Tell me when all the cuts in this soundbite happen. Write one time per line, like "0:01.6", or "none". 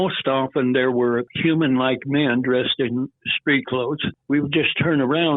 0:01.3
0:04.1

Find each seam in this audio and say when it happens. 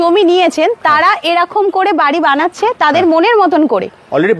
none

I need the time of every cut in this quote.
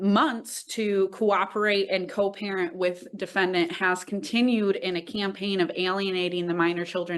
none

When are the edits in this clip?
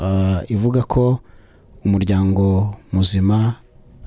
none

